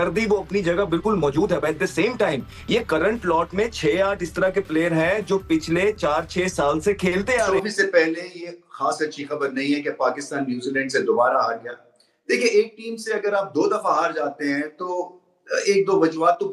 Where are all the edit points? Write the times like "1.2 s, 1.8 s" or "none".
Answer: 7.5 s

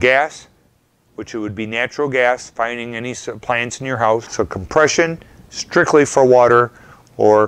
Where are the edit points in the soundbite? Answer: 4.3 s

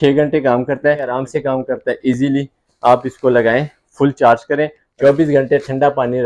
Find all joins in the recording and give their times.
1.1 s, 4.8 s

